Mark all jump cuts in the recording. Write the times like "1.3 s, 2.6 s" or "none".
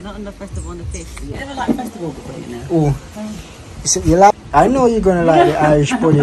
1.3 s, 4.3 s

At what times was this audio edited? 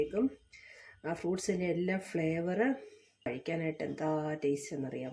3.3 s

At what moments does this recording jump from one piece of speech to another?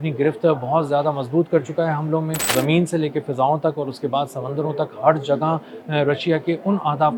2.5 s

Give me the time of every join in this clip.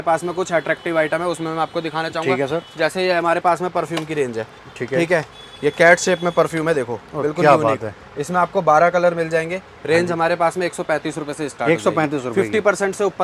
none

